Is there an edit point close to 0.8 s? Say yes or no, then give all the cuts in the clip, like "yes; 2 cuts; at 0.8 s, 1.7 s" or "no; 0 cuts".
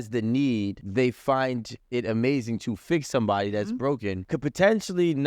yes; 2 cuts; at 0.8 s, 4.2 s